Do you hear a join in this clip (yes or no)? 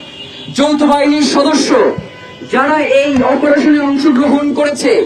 no